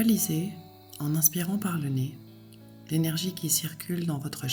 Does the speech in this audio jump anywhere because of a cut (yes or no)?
no